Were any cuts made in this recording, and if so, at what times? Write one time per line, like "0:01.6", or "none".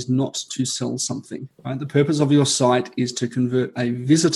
0:01.5